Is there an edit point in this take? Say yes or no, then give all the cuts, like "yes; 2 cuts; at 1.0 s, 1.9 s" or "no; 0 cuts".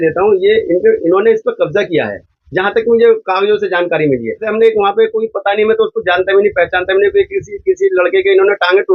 yes; 1 cut; at 4.4 s